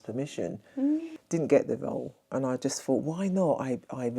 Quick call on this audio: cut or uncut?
cut